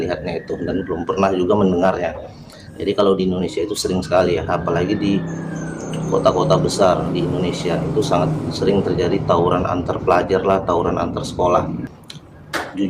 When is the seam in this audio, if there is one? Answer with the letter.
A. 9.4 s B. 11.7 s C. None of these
B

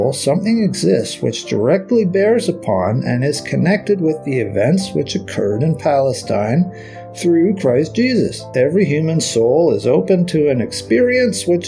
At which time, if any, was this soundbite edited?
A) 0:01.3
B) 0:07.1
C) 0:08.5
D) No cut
C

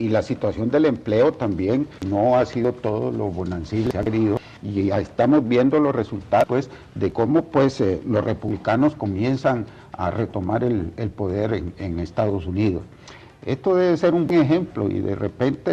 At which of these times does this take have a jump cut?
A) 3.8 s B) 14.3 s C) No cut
B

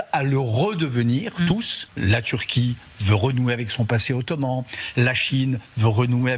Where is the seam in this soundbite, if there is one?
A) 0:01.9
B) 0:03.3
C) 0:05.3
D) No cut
A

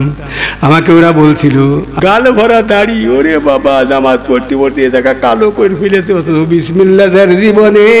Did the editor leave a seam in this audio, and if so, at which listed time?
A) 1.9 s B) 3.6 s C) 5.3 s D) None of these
A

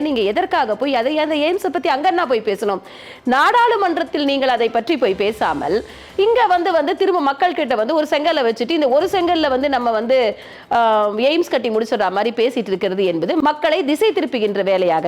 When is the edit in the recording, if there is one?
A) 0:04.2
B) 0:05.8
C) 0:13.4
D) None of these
C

